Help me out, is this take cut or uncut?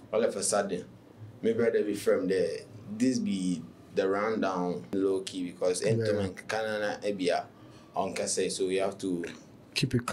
cut